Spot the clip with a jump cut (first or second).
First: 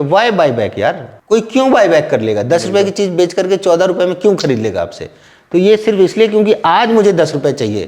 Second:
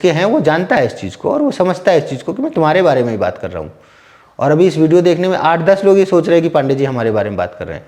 first